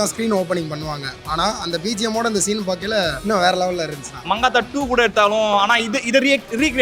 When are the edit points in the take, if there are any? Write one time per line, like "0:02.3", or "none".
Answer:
0:03.2
0:04.1